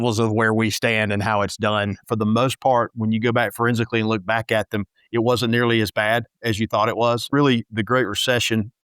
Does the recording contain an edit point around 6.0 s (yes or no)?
no